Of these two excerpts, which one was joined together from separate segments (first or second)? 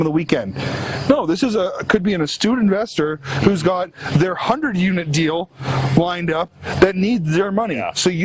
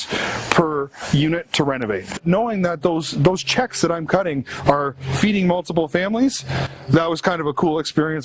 second